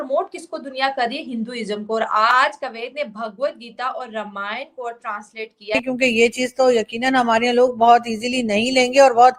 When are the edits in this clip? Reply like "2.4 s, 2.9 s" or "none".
5.8 s